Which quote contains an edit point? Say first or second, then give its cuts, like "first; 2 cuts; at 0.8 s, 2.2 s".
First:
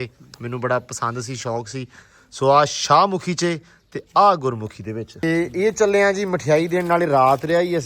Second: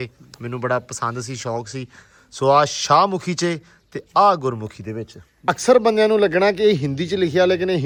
first; 1 cut; at 5.3 s